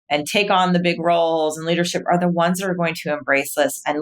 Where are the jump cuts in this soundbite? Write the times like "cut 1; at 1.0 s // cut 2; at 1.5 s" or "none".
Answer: none

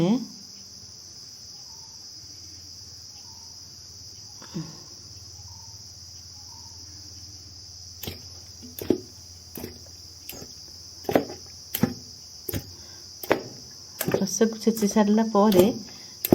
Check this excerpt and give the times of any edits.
cut 1; at 1.6 s

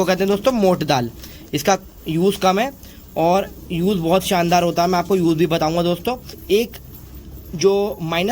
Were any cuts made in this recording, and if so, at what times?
cut 1; at 6.4 s

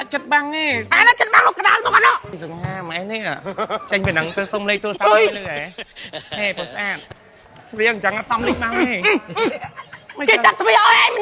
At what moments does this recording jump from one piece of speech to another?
cut 1; at 2.3 s

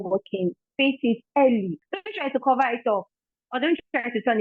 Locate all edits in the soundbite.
cut 1; at 1.8 s

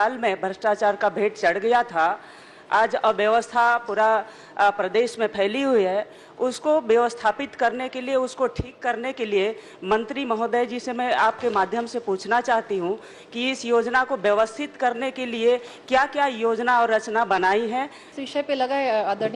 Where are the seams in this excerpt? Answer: cut 1; at 18.1 s

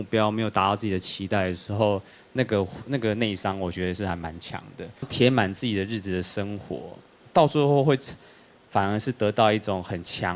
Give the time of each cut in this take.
cut 1; at 5.1 s

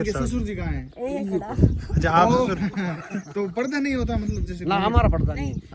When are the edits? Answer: none

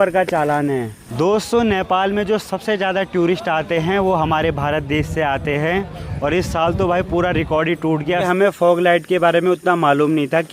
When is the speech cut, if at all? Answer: cut 1; at 1.1 s // cut 2; at 8.2 s

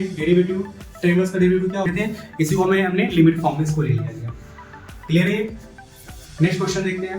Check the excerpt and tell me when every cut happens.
cut 1; at 1.8 s

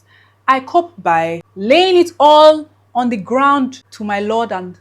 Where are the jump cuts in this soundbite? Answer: cut 1; at 1.5 s

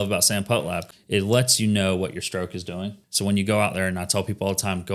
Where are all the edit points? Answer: cut 1; at 0.9 s // cut 2; at 3.0 s

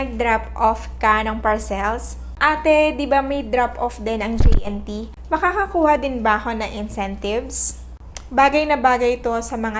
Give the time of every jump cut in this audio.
cut 1; at 2.3 s // cut 2; at 8.1 s

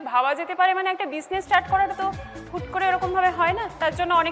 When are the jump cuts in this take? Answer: none

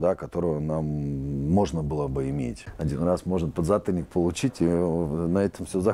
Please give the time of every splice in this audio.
cut 1; at 2.6 s

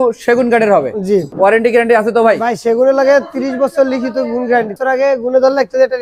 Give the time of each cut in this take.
none

